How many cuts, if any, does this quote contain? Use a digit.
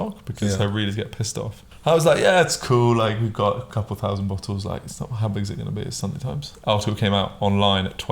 2